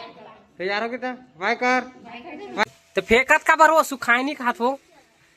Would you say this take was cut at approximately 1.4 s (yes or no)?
no